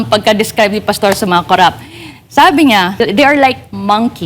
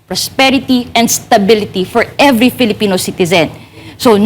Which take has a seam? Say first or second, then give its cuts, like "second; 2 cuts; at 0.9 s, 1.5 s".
first; 1 cut; at 3.0 s